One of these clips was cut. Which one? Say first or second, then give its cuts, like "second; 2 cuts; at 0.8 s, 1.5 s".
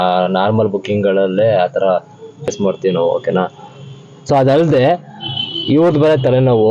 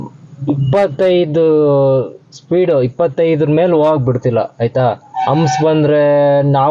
first; 1 cut; at 2.5 s